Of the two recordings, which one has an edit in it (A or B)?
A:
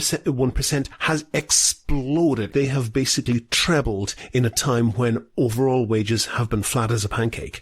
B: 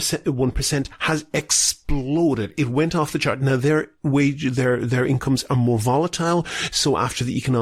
A